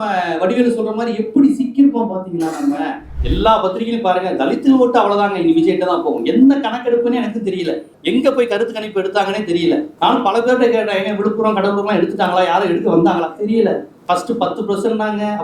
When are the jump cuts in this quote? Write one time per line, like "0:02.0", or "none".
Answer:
0:03.1